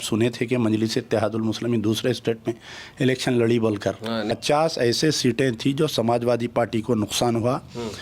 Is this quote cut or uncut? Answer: cut